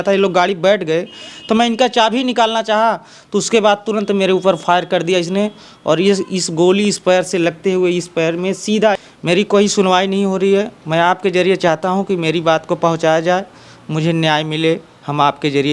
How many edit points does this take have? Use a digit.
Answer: 1